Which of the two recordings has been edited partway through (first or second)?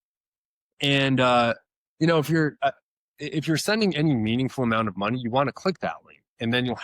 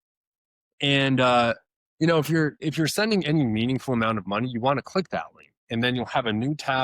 second